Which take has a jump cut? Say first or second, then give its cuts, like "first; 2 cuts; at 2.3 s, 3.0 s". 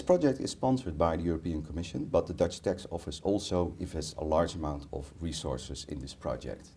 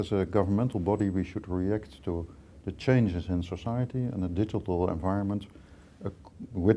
first; 1 cut; at 4.5 s